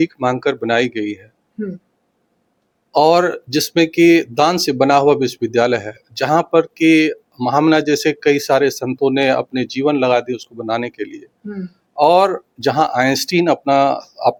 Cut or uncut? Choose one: uncut